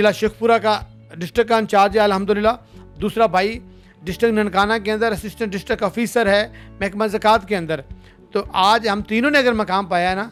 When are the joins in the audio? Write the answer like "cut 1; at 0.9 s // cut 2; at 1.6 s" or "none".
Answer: none